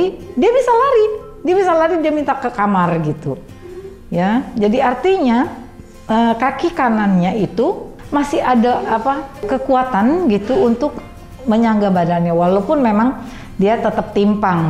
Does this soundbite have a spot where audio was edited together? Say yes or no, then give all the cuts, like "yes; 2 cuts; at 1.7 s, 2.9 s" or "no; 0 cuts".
yes; 2 cuts; at 7.9 s, 9.4 s